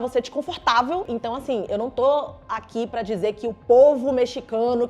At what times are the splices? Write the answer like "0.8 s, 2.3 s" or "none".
1.0 s